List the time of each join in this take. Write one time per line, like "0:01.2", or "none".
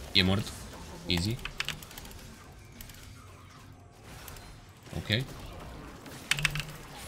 none